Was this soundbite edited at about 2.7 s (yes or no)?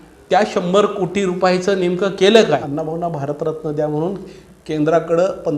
yes